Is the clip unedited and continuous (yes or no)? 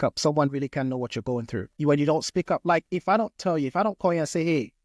no